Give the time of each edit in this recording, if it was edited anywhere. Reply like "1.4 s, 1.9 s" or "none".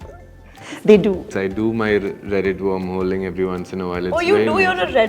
1.3 s